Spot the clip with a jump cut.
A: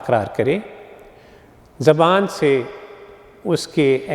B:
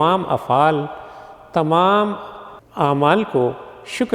B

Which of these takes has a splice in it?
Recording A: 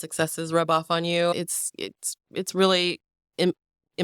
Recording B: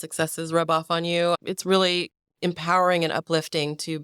B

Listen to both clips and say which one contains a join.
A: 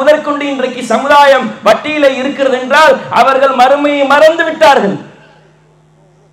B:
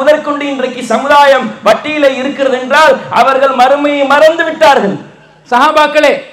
B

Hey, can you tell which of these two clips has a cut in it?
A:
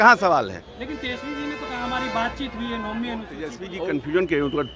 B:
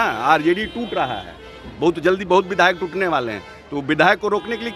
A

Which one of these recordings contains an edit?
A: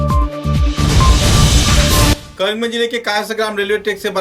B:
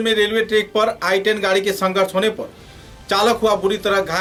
A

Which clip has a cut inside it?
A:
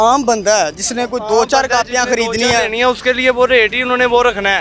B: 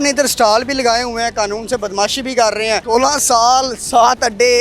B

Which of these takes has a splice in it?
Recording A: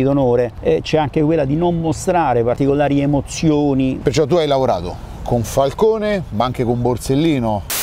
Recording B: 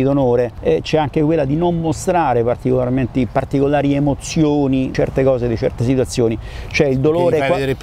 A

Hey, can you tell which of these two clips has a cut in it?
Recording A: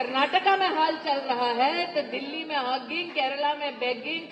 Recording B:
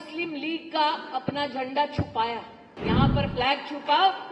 B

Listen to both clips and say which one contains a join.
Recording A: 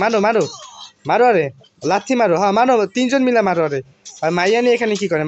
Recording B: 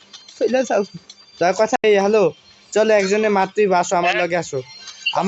B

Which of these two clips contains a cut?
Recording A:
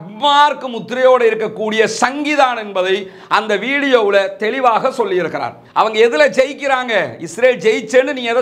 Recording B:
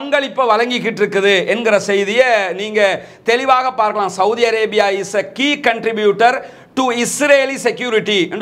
A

